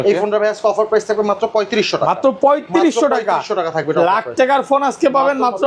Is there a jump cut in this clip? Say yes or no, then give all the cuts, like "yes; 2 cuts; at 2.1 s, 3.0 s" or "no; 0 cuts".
no; 0 cuts